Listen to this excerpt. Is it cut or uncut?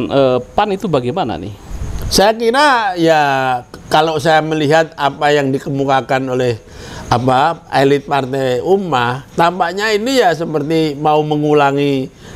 uncut